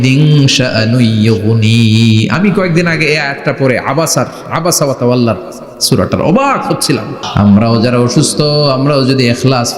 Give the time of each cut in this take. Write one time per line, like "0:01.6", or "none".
0:07.2